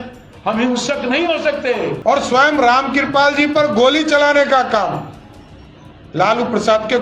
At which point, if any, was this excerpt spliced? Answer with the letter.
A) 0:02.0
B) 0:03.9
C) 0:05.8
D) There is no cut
A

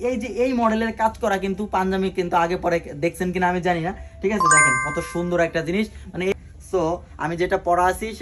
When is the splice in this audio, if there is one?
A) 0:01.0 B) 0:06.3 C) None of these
B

